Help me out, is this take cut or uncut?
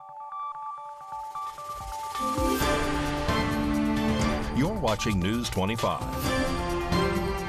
uncut